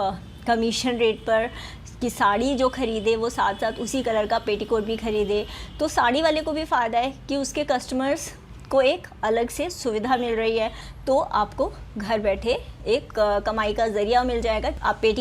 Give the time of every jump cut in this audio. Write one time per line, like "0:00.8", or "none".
0:10.9